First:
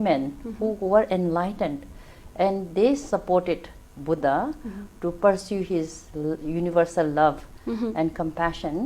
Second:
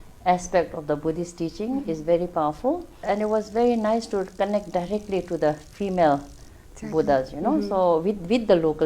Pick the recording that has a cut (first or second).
second